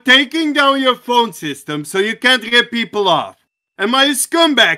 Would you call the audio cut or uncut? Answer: uncut